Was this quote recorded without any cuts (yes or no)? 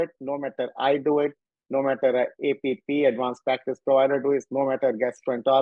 yes